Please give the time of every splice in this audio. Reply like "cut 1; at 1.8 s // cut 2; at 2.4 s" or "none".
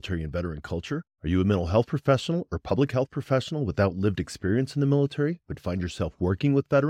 none